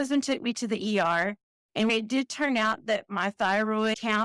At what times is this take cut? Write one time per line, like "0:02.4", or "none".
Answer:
0:01.9